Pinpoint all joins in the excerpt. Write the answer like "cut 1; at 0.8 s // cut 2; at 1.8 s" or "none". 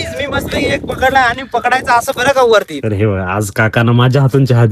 cut 1; at 2.7 s